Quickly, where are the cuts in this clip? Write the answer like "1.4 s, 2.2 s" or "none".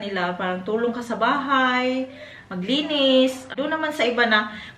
3.5 s